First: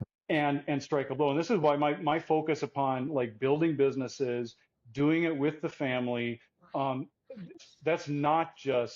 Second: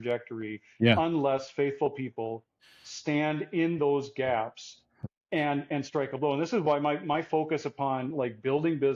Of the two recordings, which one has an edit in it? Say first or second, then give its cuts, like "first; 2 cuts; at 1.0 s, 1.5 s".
first; 1 cut; at 7.6 s